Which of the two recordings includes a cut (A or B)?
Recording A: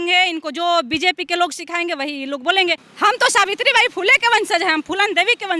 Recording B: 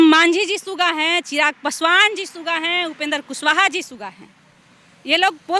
A